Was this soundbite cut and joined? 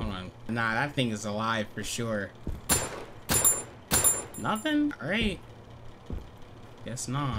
yes; 1 cut; at 2.5 s

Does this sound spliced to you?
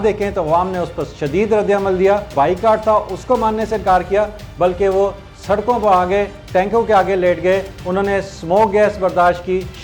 yes; 1 cut; at 2.3 s

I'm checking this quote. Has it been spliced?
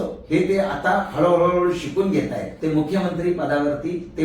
yes; 1 cut; at 2.5 s

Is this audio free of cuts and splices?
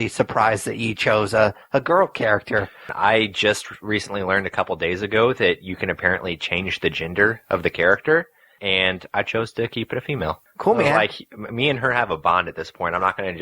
no; 3 cuts; at 2.8 s, 8.5 s, 10.4 s

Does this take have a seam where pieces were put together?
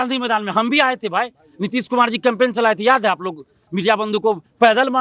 no; 0 cuts

